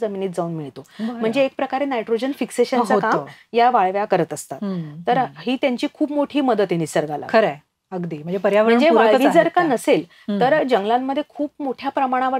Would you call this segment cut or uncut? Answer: uncut